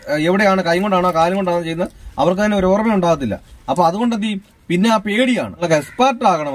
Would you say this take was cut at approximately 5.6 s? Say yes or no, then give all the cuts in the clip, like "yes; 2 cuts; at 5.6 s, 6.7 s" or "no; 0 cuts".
yes; 1 cut; at 5.6 s